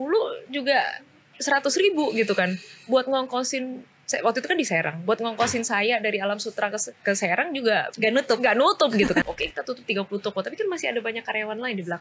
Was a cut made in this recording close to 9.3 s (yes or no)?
yes